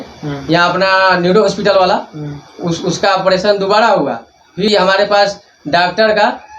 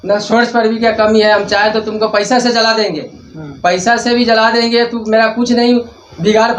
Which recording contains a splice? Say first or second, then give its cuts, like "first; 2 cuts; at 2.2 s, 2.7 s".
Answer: first; 1 cut; at 4.7 s